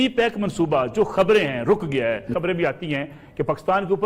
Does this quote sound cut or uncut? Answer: cut